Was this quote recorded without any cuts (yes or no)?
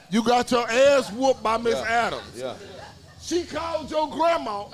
yes